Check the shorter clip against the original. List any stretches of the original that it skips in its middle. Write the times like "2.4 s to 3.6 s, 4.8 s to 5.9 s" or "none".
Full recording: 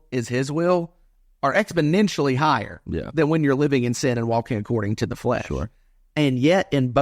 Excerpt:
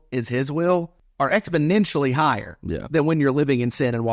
1.0 s to 1.2 s